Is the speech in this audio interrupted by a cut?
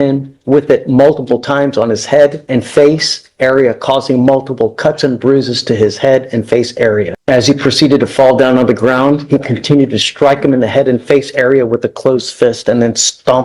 yes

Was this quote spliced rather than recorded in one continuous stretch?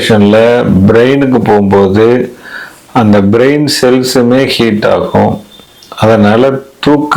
no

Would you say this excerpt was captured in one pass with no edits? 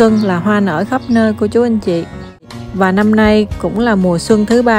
no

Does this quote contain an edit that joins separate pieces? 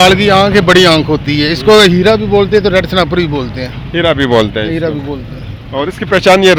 no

